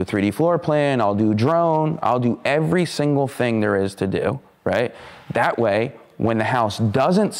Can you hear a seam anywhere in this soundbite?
no; 0 cuts

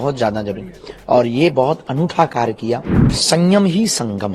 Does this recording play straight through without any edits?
no; 1 cut; at 3.2 s

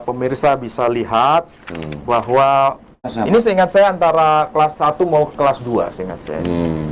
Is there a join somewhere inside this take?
yes; 1 cut; at 3.1 s

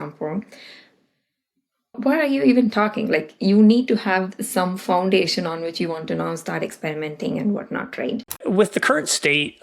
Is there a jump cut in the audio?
yes; 2 cuts; at 1.9 s, 8.4 s

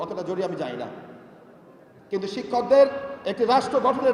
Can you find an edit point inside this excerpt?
no; 0 cuts

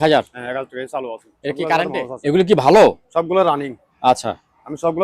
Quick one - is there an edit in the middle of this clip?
yes; 1 cut; at 2.0 s

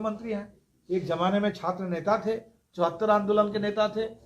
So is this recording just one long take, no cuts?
yes; 0 cuts

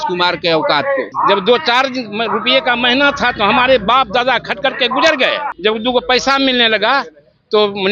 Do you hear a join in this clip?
yes; 2 cuts; at 1.1 s, 5.5 s

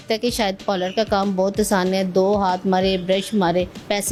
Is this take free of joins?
yes; 0 cuts

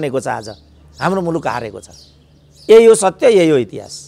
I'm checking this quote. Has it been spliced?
no; 0 cuts

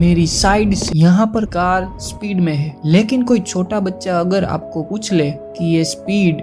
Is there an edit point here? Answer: yes; 2 cuts; at 0.8 s, 1.5 s

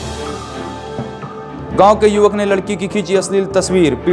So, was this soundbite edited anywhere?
yes; 1 cut; at 1.2 s

